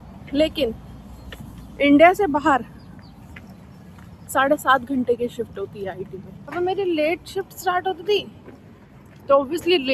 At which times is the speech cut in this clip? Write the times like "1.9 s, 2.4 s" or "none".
6.4 s